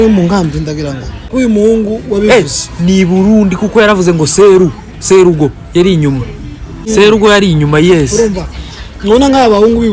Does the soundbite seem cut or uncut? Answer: cut